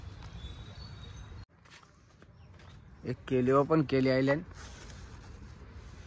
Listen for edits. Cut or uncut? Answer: cut